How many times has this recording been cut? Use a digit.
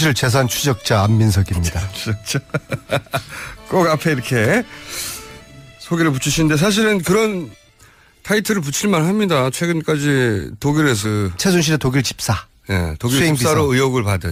0